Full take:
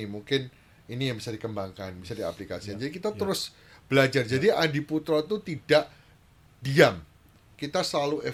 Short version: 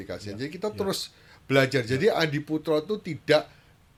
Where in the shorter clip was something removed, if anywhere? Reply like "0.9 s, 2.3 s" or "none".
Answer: none